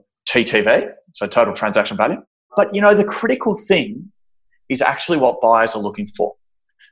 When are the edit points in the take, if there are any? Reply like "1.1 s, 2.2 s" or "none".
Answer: 2.4 s